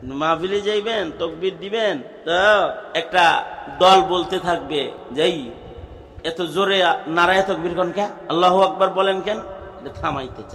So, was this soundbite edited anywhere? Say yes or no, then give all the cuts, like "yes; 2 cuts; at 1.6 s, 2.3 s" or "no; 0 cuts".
yes; 4 cuts; at 2.1 s, 2.8 s, 5.0 s, 8.2 s